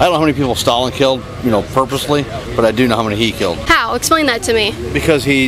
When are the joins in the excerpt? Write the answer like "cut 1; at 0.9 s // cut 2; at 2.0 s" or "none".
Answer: cut 1; at 3.6 s

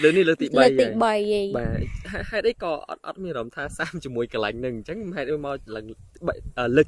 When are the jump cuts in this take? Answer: none

